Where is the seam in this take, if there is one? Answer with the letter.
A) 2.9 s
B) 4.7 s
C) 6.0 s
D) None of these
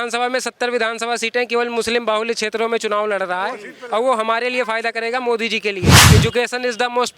C